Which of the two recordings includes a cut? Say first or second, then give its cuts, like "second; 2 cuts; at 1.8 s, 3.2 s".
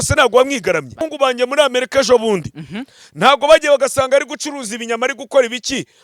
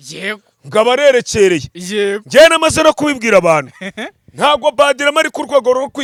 first; 1 cut; at 1.1 s